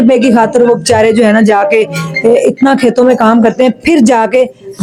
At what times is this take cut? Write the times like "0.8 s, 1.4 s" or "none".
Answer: none